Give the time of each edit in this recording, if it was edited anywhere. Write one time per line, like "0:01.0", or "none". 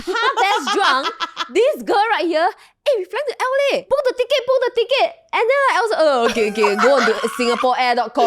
0:03.8